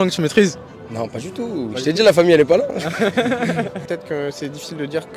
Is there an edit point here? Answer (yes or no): yes